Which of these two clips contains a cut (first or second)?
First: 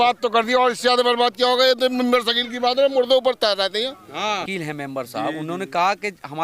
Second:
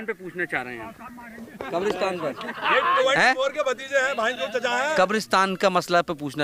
first